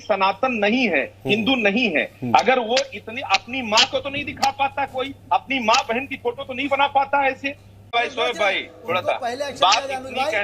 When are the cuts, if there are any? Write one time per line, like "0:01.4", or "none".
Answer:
0:07.9